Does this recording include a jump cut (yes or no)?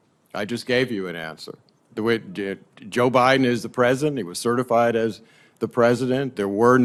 no